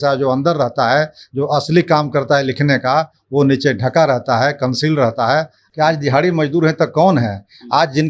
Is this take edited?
yes; 1 cut; at 5.6 s

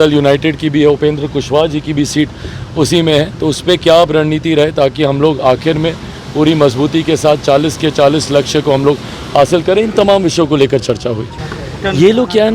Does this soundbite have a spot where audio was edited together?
yes; 1 cut; at 11.4 s

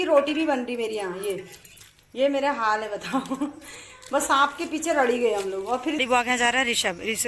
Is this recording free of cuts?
no; 1 cut; at 6.0 s

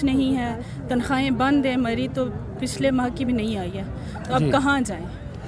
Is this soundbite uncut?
yes; 0 cuts

